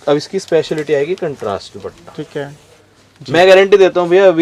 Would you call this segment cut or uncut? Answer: uncut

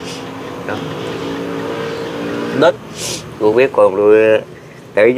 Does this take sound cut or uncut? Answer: cut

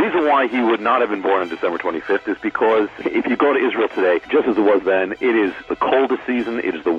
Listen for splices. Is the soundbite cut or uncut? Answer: cut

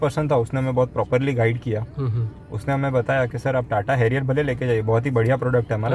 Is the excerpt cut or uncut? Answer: uncut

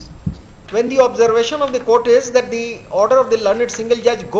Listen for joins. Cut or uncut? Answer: uncut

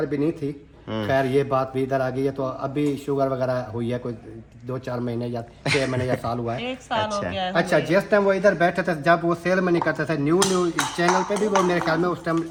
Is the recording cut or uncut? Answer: uncut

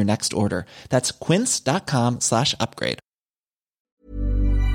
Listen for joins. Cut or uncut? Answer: cut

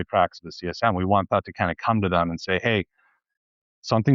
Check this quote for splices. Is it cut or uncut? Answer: uncut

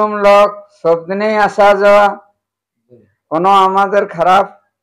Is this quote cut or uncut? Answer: uncut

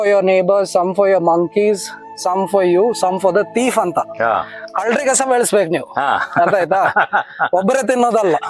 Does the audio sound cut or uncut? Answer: uncut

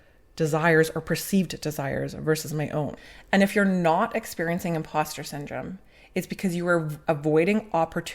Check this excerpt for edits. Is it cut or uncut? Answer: cut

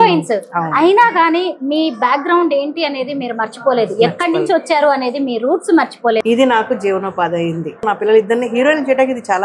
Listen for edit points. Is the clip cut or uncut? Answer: cut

